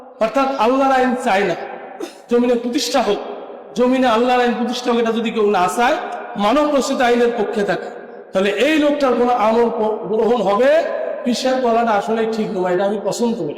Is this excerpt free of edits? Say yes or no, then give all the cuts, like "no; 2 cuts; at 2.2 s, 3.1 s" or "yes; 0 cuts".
no; 1 cut; at 11.1 s